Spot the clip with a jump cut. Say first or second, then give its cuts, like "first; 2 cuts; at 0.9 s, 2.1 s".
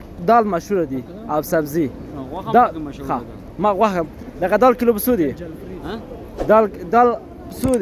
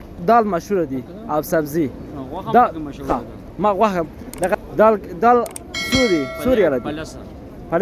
second; 1 cut; at 4.5 s